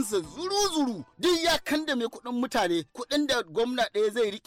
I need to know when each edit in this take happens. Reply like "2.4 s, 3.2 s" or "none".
1.1 s